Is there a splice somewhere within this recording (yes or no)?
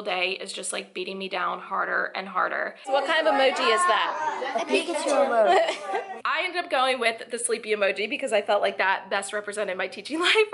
yes